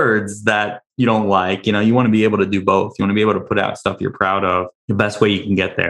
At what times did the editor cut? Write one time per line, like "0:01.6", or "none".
0:04.8